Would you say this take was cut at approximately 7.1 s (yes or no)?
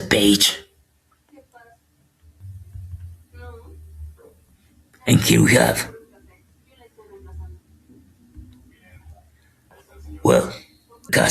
no